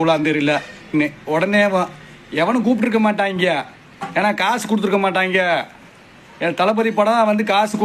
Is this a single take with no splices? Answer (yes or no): no